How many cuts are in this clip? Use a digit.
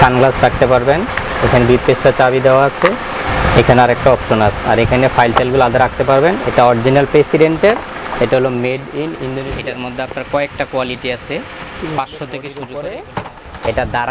2